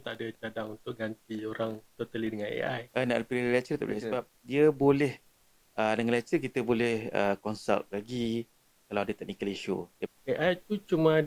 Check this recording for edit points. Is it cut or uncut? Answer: cut